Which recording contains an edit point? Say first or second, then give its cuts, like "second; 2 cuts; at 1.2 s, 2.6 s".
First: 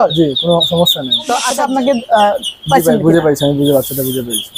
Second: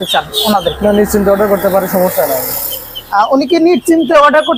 first; 1 cut; at 1.5 s